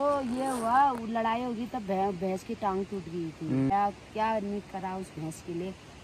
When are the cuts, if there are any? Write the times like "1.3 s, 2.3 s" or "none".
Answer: 3.7 s